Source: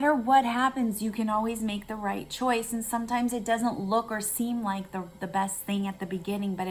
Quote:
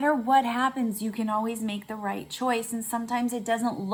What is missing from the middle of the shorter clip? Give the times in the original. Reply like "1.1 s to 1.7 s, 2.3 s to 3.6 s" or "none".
none